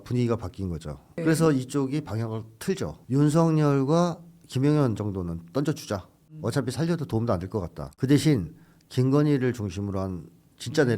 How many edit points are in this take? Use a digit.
2